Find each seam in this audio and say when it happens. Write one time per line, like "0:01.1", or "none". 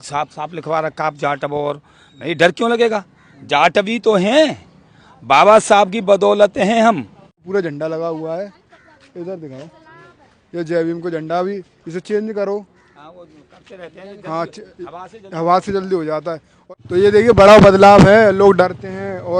0:07.4
0:16.5